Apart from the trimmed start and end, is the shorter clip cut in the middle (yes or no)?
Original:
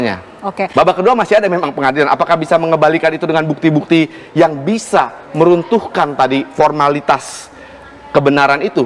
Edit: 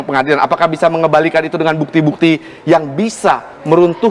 no